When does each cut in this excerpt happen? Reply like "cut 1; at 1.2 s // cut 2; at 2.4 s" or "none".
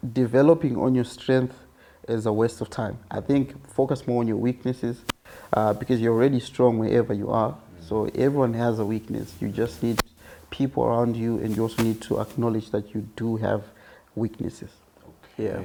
none